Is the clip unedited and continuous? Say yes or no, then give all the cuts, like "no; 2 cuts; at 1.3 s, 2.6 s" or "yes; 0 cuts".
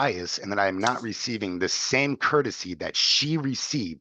yes; 0 cuts